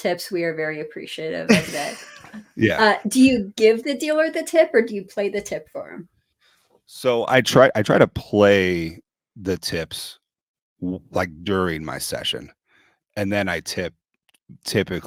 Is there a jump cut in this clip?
no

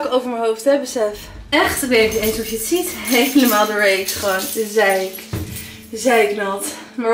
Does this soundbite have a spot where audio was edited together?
no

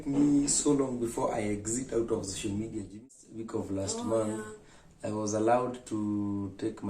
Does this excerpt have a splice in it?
yes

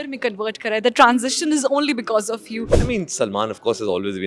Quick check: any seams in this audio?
yes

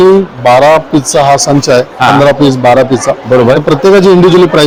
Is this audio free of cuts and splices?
yes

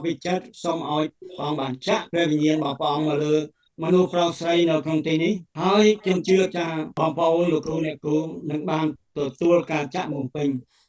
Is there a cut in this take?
yes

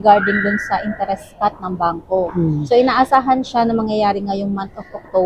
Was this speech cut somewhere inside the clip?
no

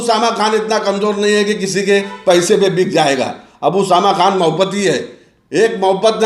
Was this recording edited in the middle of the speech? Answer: no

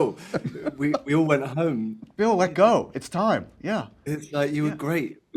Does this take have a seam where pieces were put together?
yes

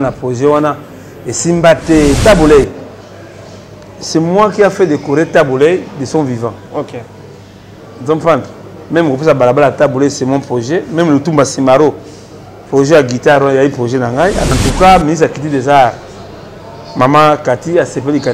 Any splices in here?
yes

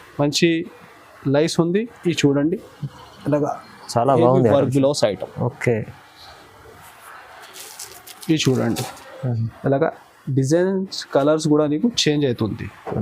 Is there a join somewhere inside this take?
no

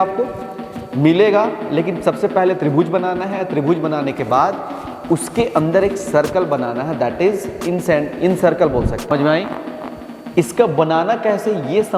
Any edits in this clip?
yes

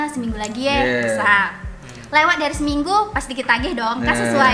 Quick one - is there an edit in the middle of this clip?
no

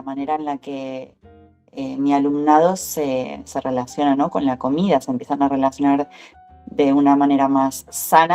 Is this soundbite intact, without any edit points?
yes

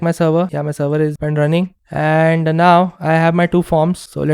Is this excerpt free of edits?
no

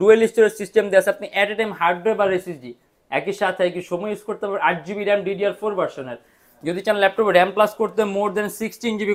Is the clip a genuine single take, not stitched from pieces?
yes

